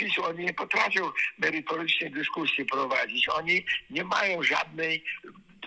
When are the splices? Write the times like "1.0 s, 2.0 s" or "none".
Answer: none